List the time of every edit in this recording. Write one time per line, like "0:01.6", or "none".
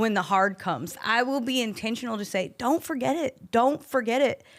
0:01.0